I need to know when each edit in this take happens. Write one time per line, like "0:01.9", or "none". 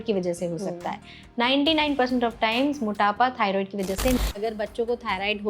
0:04.4